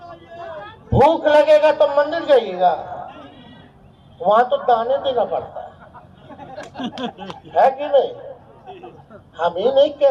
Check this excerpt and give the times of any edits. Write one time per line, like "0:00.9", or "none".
none